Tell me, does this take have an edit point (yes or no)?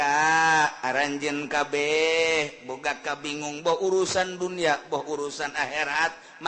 no